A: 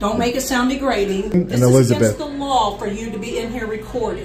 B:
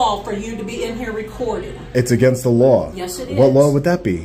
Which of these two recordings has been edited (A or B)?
A